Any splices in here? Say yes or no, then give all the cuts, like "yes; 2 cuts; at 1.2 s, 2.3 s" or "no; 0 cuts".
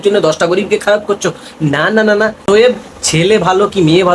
yes; 1 cut; at 2.4 s